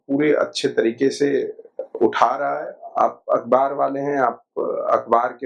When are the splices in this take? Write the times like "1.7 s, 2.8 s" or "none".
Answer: 2.8 s